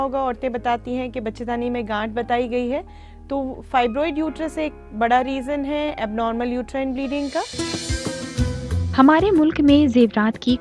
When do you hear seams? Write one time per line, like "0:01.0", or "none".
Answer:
0:07.5
0:08.9